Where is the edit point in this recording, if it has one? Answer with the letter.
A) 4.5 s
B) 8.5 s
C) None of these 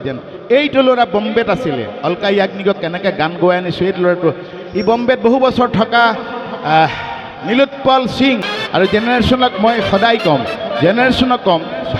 B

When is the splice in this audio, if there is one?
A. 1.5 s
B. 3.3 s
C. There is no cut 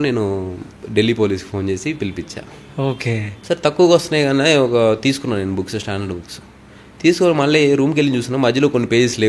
B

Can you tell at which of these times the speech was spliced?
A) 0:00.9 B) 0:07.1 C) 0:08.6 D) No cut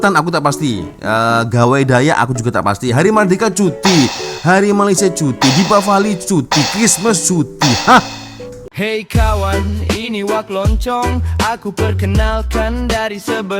C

